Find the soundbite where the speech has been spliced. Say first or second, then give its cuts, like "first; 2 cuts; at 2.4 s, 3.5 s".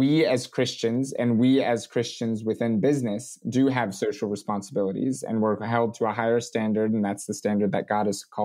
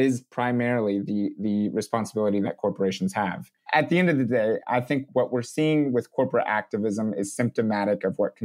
second; 2 cuts; at 3.6 s, 5.1 s